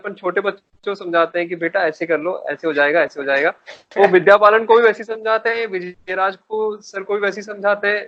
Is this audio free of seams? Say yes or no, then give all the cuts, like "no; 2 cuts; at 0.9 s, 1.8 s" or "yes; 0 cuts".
yes; 0 cuts